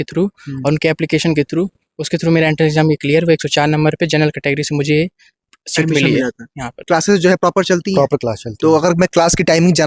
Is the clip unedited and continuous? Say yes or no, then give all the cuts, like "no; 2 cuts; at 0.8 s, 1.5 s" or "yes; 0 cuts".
no; 1 cut; at 6.7 s